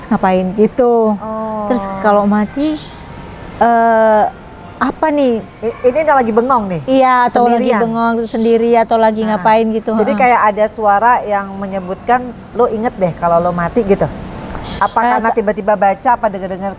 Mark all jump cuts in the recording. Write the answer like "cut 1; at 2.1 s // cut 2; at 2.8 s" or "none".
none